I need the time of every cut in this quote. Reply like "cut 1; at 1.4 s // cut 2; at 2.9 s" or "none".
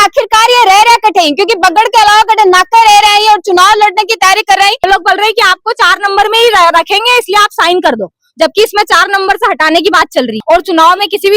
cut 1; at 4.9 s // cut 2; at 10.4 s